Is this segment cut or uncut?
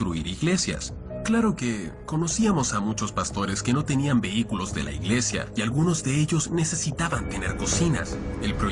cut